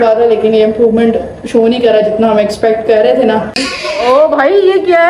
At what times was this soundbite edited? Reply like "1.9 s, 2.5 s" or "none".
3.6 s